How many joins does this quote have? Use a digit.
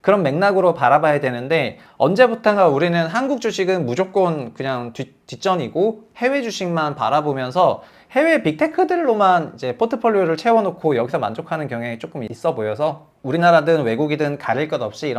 2